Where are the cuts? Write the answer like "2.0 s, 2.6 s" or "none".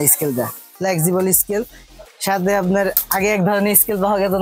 none